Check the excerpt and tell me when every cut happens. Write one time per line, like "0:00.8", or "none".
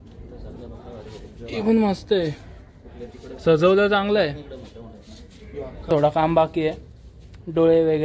0:05.9

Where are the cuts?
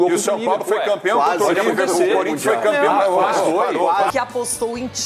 0:04.1

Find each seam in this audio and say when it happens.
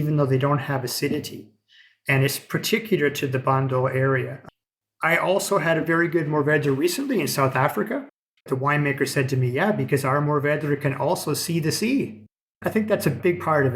0:08.3
0:12.3

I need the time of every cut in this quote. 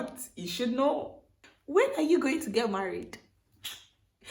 none

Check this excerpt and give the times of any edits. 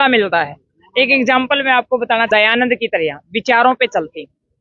0:02.3

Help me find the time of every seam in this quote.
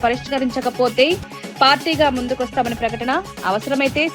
none

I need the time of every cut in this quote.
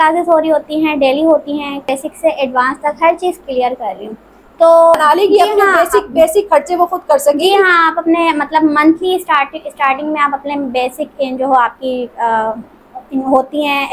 0:01.9
0:05.0

